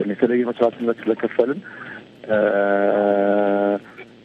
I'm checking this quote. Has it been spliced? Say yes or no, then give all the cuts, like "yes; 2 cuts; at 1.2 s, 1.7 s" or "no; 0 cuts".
no; 0 cuts